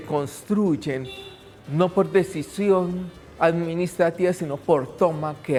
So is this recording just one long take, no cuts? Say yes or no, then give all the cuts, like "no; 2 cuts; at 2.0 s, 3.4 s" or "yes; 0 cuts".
yes; 0 cuts